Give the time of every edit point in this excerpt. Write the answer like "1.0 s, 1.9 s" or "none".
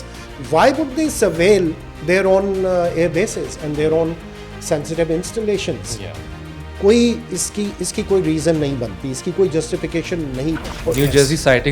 1.9 s, 10.7 s